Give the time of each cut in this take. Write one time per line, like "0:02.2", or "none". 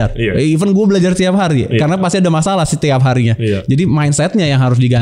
none